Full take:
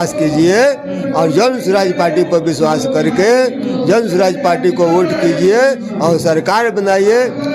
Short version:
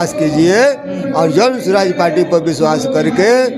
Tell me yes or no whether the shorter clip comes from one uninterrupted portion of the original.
yes